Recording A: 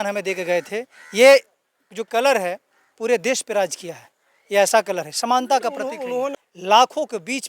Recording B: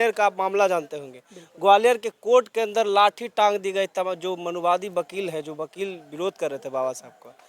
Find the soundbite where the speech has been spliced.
A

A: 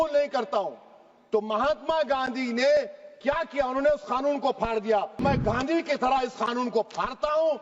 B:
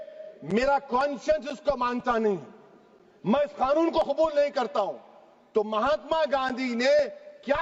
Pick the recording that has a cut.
A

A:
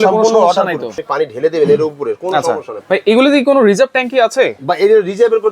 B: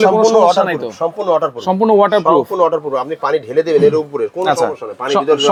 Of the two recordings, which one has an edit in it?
A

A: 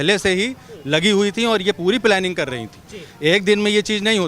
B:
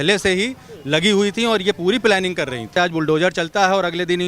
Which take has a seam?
B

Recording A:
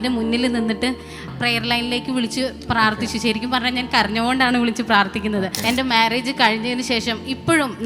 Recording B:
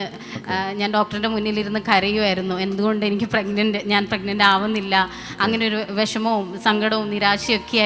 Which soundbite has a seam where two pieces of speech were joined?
A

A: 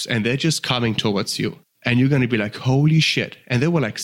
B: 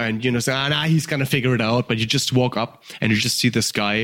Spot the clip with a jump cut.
A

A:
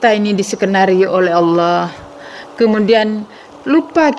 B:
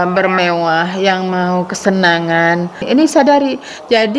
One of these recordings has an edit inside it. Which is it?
B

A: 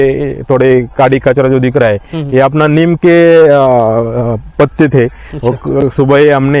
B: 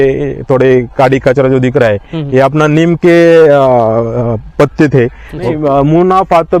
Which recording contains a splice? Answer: B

